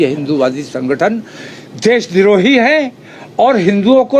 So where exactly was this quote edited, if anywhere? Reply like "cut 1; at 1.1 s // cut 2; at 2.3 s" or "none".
none